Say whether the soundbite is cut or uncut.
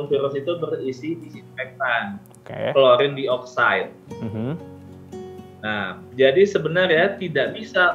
uncut